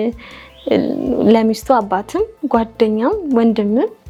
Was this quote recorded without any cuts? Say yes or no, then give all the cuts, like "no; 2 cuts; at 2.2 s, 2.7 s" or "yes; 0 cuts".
yes; 0 cuts